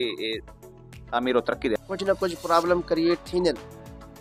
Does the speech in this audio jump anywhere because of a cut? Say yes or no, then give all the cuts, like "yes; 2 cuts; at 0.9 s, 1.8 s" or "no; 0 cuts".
yes; 1 cut; at 1.8 s